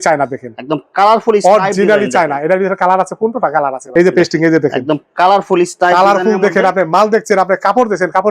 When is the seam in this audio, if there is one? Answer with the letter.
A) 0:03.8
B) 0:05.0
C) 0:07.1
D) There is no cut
A